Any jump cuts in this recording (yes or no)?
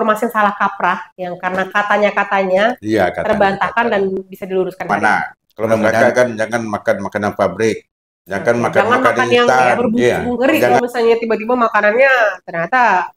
yes